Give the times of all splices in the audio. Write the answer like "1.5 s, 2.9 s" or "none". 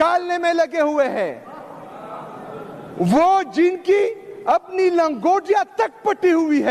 none